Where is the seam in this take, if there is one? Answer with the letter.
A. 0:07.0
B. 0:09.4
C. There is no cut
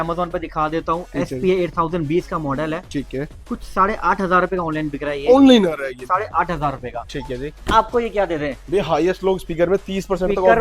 C